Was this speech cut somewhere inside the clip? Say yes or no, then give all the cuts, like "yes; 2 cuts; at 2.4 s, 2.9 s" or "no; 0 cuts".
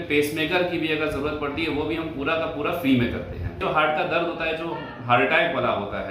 yes; 1 cut; at 3.6 s